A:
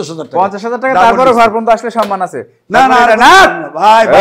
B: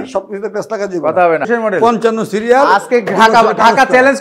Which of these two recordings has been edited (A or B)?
B